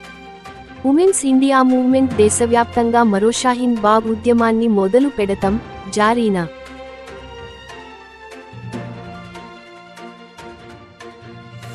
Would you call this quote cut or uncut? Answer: uncut